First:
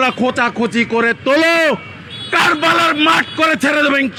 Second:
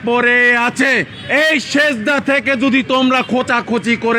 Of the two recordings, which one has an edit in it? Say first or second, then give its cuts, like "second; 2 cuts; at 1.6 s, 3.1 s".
second; 1 cut; at 1.2 s